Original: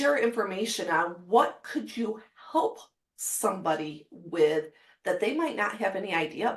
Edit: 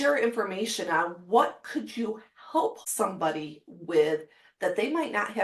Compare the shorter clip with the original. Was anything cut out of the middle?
yes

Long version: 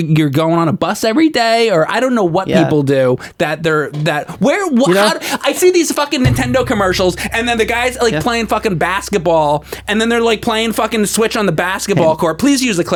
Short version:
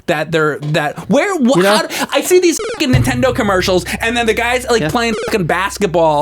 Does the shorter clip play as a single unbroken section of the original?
yes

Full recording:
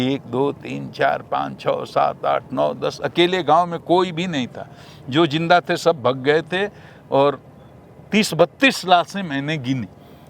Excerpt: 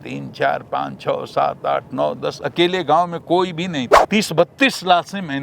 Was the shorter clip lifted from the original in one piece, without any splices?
no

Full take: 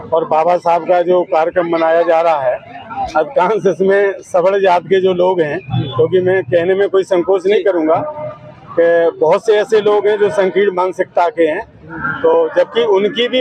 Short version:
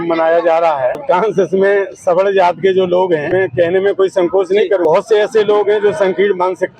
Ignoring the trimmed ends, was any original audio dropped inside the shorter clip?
yes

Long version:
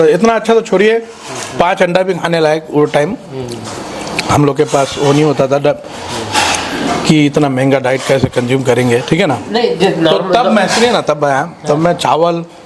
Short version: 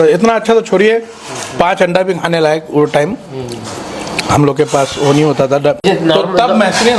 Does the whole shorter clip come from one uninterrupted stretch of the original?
no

